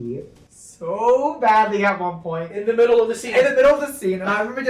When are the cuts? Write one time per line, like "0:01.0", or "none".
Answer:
none